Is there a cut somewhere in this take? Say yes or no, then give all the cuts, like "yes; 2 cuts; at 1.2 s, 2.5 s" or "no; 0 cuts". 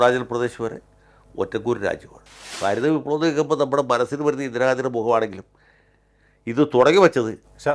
yes; 1 cut; at 2.5 s